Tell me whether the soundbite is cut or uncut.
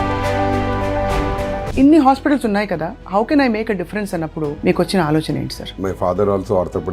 cut